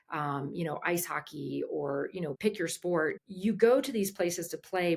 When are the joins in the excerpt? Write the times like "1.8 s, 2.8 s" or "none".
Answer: 2.4 s, 3.2 s